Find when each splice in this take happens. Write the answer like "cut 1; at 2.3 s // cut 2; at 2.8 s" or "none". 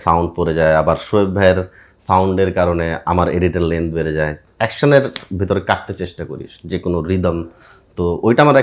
cut 1; at 4.5 s